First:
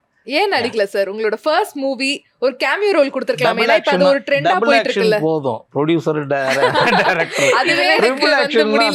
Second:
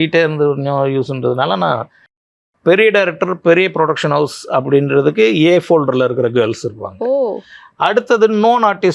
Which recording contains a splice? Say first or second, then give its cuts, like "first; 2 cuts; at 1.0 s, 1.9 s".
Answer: second; 1 cut; at 2.1 s